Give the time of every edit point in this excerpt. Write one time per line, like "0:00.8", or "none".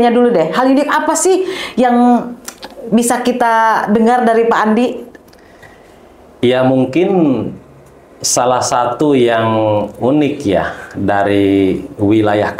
none